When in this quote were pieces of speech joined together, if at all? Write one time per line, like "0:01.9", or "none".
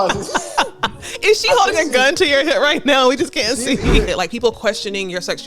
0:04.1